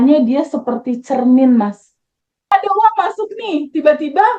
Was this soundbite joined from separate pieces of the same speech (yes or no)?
yes